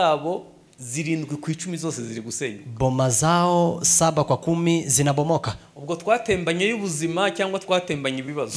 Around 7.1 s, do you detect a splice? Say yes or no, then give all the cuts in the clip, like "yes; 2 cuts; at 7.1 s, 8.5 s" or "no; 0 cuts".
no; 0 cuts